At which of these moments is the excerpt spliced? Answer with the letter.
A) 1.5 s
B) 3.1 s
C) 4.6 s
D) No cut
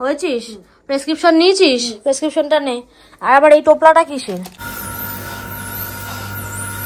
C